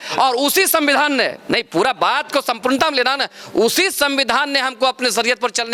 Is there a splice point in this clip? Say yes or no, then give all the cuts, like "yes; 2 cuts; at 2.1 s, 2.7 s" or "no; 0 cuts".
no; 0 cuts